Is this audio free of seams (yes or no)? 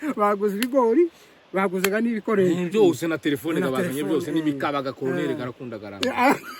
yes